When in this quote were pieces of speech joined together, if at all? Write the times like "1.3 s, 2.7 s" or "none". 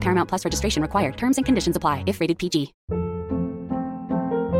2.8 s